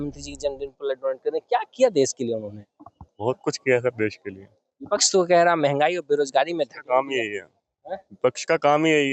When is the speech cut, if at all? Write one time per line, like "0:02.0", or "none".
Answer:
none